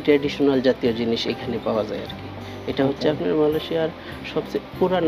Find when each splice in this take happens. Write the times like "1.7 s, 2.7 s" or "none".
none